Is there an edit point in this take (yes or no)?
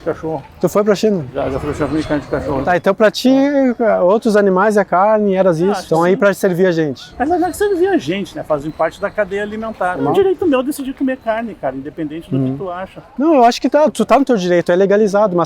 yes